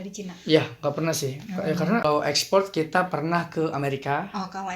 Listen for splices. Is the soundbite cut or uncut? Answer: cut